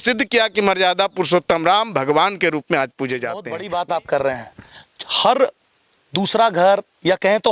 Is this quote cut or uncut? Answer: cut